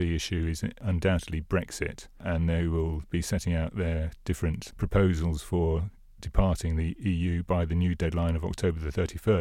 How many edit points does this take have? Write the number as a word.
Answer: four